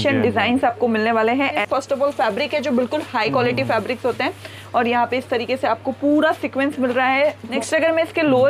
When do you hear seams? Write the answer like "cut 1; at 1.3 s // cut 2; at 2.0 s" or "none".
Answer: cut 1; at 1.6 s // cut 2; at 7.4 s